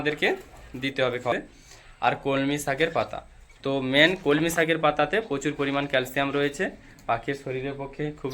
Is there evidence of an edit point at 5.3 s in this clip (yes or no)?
no